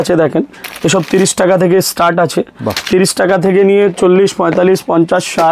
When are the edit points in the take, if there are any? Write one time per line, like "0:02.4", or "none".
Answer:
none

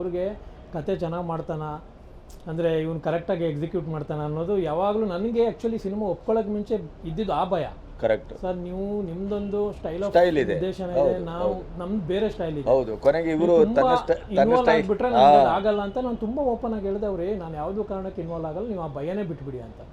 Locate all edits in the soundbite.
none

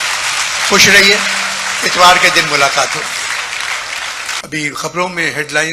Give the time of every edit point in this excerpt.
0:04.4

